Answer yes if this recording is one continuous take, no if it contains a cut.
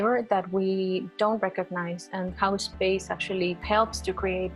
no